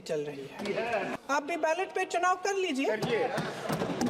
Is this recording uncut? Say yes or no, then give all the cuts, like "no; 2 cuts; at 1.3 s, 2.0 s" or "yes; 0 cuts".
no; 1 cut; at 1.1 s